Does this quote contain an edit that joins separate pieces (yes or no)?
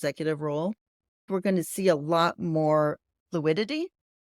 yes